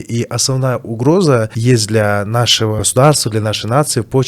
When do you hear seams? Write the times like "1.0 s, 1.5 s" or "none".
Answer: 1.5 s, 2.8 s